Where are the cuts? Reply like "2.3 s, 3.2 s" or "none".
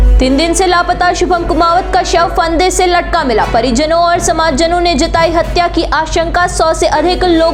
none